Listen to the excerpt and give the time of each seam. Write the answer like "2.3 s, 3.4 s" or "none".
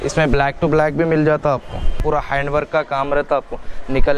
2.0 s